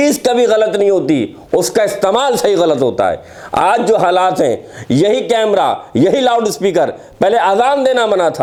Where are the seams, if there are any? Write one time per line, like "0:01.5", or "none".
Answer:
none